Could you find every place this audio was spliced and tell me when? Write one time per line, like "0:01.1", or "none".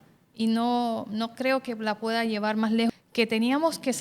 0:02.9